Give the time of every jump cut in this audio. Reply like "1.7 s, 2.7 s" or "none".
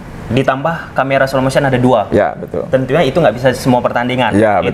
none